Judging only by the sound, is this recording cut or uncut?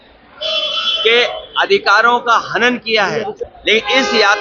cut